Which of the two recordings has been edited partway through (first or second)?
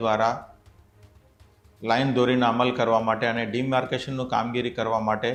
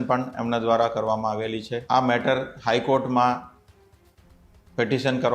second